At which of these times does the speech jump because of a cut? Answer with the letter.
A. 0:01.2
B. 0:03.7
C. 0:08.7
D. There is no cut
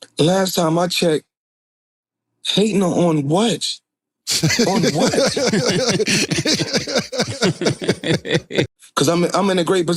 C